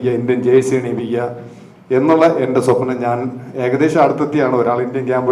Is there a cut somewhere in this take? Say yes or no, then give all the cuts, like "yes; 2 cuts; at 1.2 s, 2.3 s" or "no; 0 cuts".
no; 0 cuts